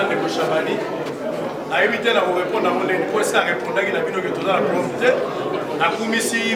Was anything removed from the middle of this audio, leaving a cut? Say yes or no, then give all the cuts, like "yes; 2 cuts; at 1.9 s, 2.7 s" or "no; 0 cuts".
no; 0 cuts